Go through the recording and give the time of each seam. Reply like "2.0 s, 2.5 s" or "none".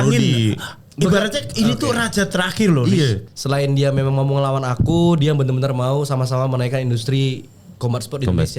3.2 s